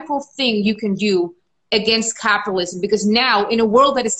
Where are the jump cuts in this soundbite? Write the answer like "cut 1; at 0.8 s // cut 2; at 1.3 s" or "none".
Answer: none